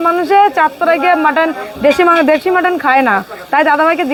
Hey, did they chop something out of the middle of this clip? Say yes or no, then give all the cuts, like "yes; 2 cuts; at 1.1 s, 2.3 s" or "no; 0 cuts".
no; 0 cuts